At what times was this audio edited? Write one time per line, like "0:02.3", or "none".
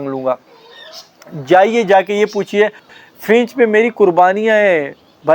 0:02.9